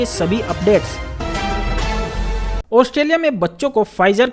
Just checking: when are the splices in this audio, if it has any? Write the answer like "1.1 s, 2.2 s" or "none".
1.0 s, 2.2 s